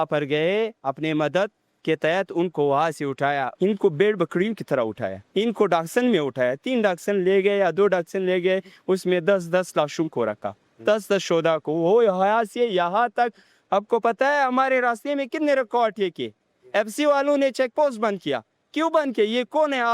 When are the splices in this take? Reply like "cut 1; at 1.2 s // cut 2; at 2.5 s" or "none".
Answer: cut 1; at 3.5 s // cut 2; at 5.2 s